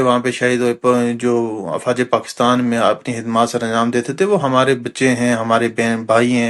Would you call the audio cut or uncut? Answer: uncut